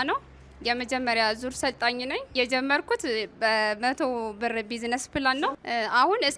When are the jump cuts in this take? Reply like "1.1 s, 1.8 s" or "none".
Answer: 2.3 s